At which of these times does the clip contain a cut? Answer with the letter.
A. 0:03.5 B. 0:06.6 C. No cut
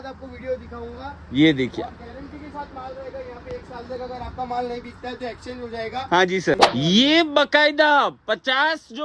B